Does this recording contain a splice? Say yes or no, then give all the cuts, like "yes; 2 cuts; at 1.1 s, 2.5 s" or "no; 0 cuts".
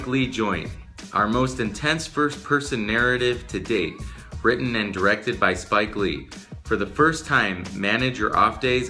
no; 0 cuts